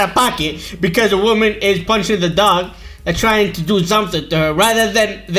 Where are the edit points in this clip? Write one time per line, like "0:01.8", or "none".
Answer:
none